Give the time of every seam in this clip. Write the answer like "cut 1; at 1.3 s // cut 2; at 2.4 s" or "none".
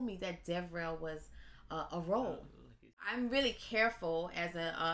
cut 1; at 3.0 s